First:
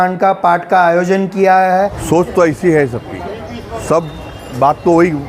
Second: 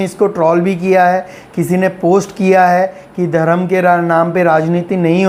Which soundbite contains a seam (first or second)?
first